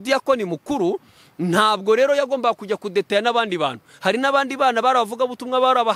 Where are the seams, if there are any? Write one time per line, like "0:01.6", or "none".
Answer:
none